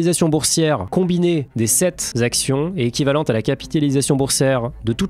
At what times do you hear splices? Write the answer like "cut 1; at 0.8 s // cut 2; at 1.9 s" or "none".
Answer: cut 1; at 0.8 s // cut 2; at 2.0 s

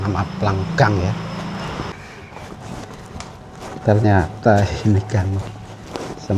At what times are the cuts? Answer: cut 1; at 1.9 s

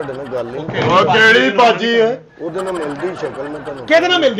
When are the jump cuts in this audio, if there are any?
none

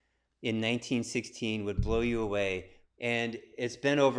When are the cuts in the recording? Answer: cut 1; at 2.8 s

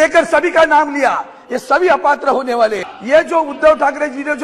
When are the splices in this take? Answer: cut 1; at 2.9 s

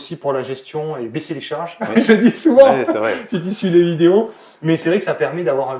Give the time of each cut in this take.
none

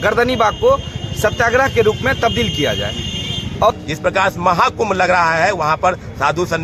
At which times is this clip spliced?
cut 1; at 3.7 s

